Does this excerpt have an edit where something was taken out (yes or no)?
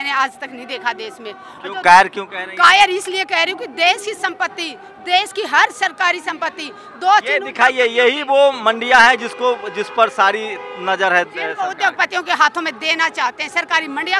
no